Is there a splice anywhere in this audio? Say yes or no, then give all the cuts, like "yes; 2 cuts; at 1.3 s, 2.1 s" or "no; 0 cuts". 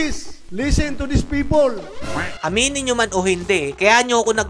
yes; 1 cut; at 2.4 s